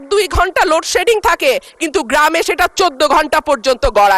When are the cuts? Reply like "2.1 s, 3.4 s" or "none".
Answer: none